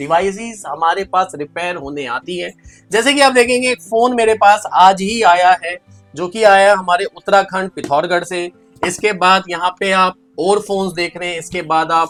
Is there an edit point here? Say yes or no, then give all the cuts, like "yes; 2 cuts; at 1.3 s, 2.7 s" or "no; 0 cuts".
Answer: no; 0 cuts